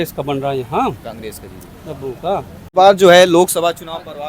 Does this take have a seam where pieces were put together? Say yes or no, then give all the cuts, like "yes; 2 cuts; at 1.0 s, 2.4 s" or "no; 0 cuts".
yes; 1 cut; at 2.7 s